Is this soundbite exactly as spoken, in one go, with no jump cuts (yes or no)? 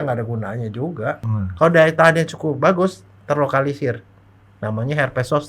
no